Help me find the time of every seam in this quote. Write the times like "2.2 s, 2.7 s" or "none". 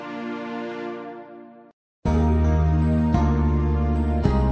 1.6 s